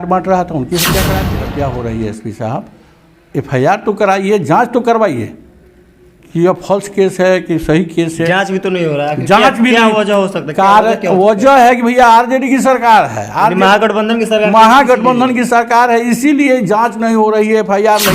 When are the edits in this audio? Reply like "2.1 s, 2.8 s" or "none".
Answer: 1.3 s